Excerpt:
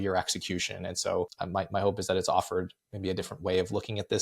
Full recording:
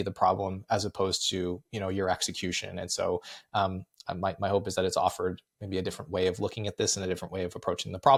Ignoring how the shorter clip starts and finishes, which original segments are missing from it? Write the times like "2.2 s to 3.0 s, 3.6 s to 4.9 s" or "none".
3.3 s to 4.0 s